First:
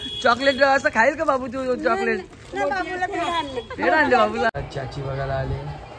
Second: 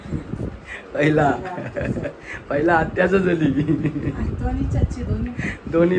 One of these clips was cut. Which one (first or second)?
first